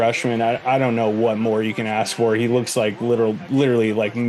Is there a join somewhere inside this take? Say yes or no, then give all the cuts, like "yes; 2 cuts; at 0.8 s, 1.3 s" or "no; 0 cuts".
no; 0 cuts